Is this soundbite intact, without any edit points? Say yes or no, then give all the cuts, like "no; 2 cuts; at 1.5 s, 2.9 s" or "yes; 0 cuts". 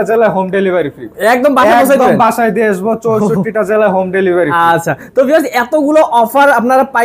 yes; 0 cuts